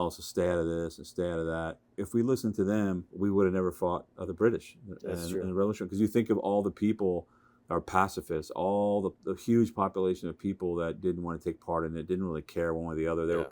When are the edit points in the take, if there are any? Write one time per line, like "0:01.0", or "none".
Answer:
0:02.0
0:03.1